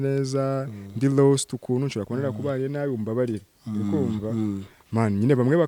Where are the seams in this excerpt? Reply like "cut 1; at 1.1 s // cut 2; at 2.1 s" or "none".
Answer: none